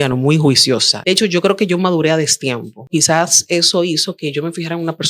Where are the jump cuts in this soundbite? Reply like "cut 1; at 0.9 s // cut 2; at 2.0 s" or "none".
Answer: cut 1; at 0.9 s // cut 2; at 2.9 s